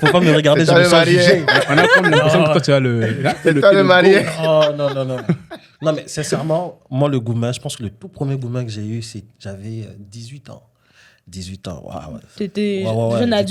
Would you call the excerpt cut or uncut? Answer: uncut